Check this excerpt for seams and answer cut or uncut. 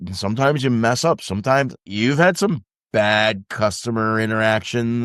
cut